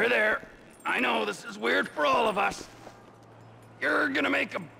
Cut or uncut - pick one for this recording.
uncut